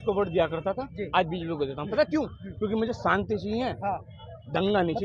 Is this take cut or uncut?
uncut